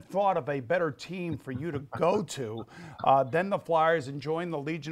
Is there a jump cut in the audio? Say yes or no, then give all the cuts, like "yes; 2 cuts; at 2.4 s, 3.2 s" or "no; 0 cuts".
no; 0 cuts